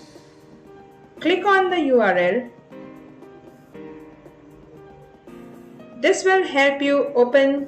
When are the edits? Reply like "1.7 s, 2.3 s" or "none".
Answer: 1.1 s, 2.6 s, 5.9 s

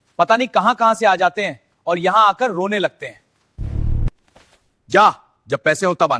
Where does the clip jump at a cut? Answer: 4.2 s

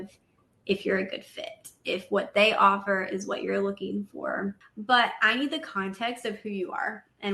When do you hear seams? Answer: 4.7 s

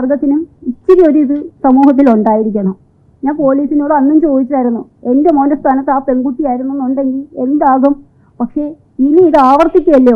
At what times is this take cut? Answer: none

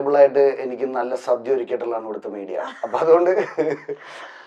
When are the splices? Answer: none

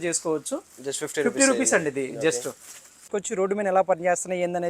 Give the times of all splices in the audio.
3.0 s

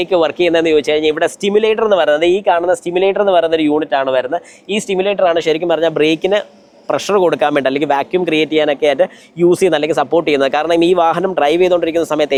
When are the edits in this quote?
none

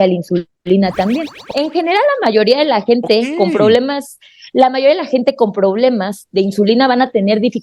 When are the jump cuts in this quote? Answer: 1.4 s

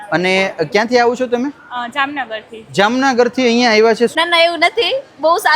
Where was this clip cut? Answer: 4.1 s

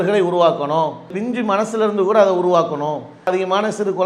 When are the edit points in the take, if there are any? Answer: 1.1 s, 3.3 s

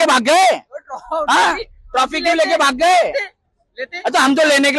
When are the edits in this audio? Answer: none

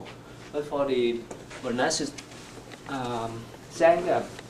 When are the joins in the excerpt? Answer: 2.1 s

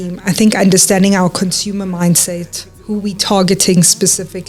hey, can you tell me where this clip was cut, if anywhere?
none

